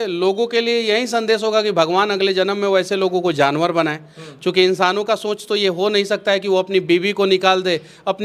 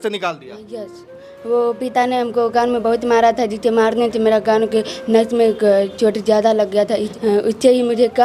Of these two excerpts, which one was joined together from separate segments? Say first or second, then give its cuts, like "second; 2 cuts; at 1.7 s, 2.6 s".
second; 2 cuts; at 1.1 s, 7.1 s